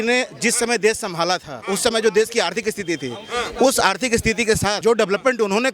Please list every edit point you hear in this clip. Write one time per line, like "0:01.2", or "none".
0:01.5
0:04.8